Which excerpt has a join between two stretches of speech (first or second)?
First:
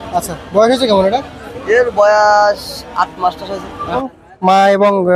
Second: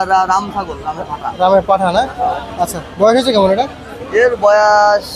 first